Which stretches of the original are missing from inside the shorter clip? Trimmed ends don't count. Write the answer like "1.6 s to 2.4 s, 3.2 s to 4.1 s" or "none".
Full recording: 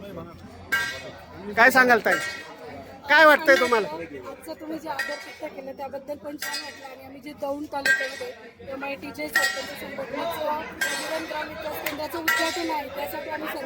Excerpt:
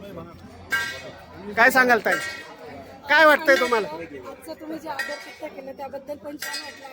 none